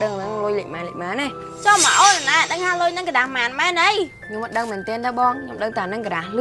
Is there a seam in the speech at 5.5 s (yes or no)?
no